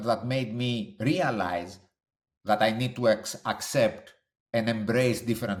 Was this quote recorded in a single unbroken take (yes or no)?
yes